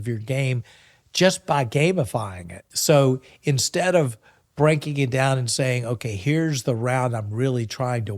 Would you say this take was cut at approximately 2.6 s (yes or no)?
yes